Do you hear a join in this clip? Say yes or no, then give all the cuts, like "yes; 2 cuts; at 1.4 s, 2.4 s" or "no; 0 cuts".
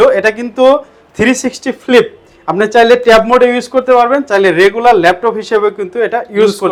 no; 0 cuts